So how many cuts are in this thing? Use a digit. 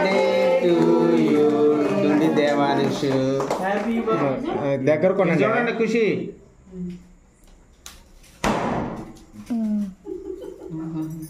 1